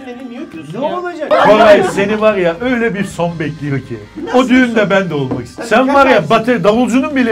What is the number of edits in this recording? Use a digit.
2